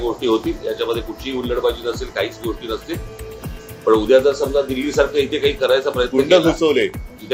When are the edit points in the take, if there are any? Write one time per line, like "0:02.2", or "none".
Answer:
none